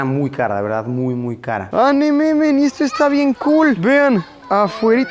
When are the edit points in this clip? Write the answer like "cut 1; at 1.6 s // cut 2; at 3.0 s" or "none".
cut 1; at 1.7 s